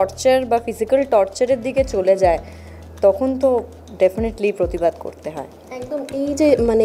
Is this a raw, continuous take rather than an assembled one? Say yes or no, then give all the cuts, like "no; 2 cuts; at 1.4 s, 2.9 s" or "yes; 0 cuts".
yes; 0 cuts